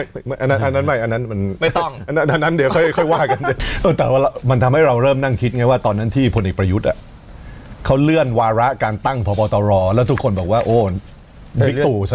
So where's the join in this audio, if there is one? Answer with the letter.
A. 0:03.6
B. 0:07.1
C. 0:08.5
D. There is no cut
A